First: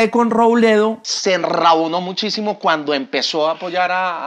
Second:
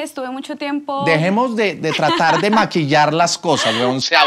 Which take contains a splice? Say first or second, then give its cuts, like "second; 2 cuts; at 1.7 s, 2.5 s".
first; 1 cut; at 1.1 s